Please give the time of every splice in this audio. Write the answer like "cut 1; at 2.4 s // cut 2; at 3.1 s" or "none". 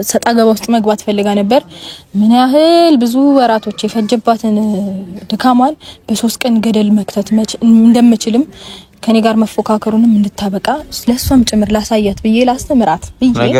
none